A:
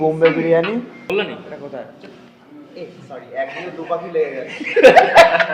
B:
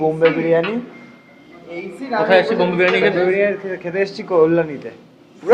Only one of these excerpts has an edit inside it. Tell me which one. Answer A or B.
A